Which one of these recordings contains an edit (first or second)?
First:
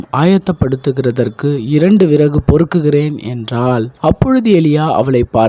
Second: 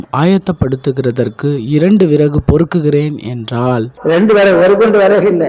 first